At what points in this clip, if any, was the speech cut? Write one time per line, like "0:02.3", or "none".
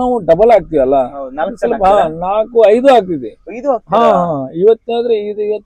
none